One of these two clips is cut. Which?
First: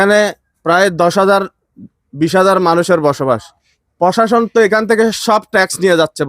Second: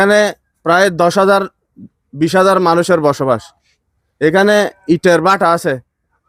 first; 1 cut; at 3.8 s

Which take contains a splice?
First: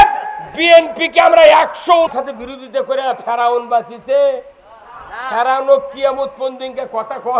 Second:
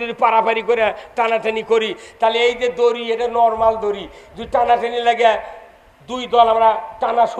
first; 1 cut; at 2.1 s

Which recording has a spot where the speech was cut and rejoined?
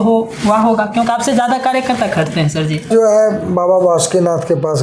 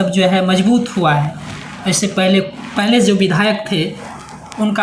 first; 1 cut; at 2.9 s

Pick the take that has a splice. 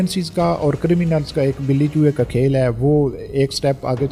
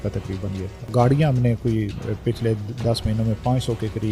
second; 1 cut; at 0.9 s

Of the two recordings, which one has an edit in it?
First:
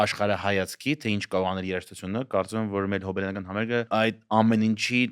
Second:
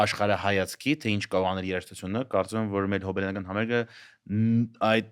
first; 1 cut; at 3.9 s

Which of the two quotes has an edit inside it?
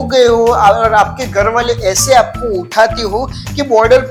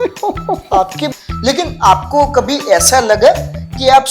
second; 1 cut; at 1.1 s

